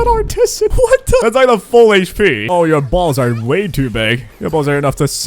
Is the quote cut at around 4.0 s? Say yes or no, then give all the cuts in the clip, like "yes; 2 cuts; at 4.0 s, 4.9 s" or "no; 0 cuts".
no; 2 cuts; at 1.2 s, 2.5 s